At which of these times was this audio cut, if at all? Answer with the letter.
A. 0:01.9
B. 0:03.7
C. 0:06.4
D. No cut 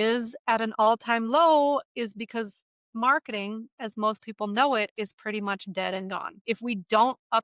C